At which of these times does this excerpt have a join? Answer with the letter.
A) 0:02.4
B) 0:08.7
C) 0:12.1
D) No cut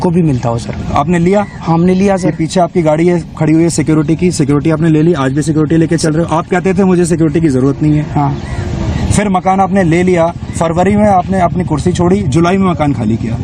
D